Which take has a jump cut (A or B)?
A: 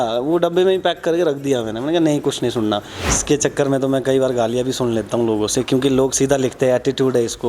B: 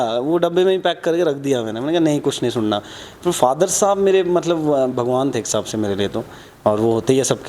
A